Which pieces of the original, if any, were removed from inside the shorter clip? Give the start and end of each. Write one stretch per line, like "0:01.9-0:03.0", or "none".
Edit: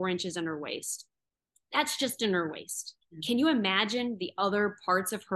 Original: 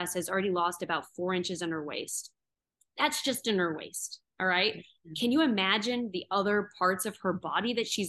0:04.2-0:04.9